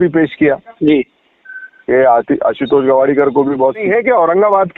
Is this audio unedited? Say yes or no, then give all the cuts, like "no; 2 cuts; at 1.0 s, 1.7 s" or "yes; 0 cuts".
no; 1 cut; at 3.8 s